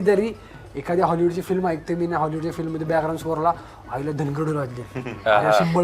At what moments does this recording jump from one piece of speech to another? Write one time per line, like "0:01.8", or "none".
none